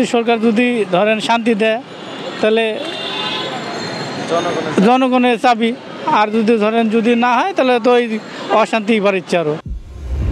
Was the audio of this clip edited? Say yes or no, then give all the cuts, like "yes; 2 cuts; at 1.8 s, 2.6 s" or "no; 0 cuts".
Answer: no; 0 cuts